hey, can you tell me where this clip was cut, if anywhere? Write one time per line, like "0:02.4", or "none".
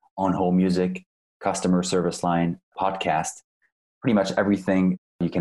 0:02.7